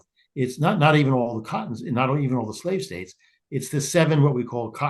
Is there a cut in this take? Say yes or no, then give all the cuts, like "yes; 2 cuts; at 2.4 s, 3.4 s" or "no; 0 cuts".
no; 0 cuts